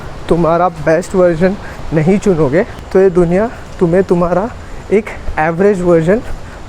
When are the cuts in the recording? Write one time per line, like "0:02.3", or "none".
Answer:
none